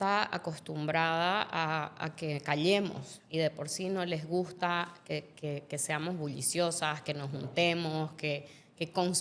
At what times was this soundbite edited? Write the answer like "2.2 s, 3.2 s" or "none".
none